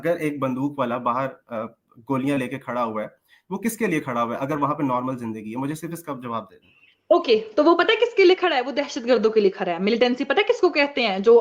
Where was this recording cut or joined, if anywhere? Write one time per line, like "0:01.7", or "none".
none